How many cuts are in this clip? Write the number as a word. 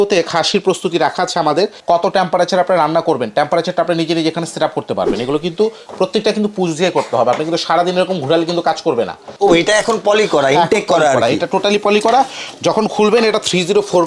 two